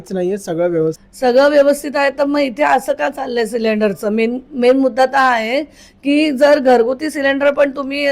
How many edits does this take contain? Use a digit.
1